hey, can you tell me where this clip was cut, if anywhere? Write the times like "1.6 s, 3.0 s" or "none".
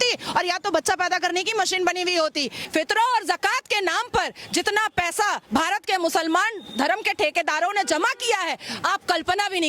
2.6 s